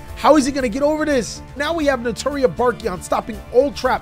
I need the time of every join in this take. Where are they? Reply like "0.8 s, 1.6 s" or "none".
1.6 s